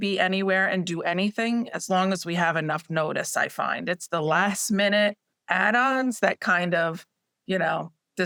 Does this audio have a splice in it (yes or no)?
no